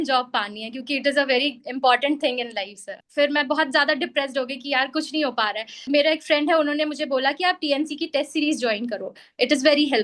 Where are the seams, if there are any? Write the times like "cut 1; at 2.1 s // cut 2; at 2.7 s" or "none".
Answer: cut 1; at 3.0 s // cut 2; at 5.9 s